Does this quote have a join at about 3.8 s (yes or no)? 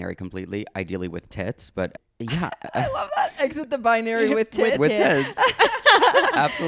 no